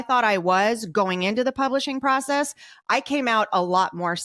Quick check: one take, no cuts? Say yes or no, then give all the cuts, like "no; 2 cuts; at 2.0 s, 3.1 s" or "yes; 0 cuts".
yes; 0 cuts